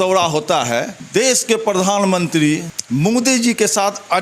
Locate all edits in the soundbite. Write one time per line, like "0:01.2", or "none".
0:01.0
0:02.7